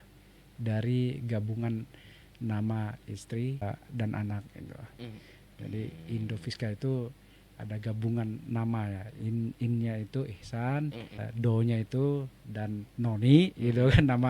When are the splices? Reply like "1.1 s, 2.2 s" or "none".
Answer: 3.6 s, 11.2 s